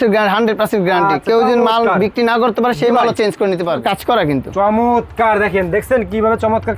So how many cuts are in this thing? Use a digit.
1